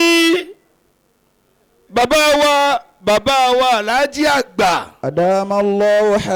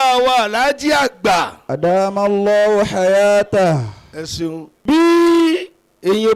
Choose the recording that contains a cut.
second; 1 cut; at 4.7 s

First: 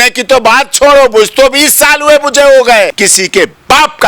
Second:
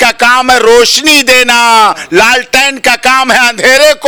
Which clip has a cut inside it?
first; 1 cut; at 3.0 s

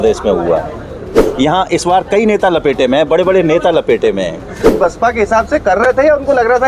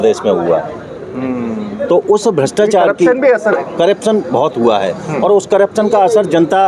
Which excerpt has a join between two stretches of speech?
first; 2 cuts; at 1.2 s, 4.7 s

